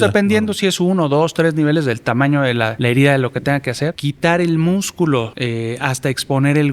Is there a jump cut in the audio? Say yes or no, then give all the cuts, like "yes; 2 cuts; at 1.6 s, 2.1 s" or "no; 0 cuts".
yes; 3 cuts; at 2.8 s, 4.0 s, 5.3 s